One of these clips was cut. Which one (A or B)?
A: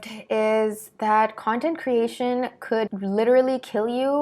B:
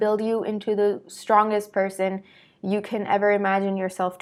A